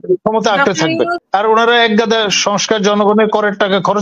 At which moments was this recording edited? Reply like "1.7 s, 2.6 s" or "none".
1.2 s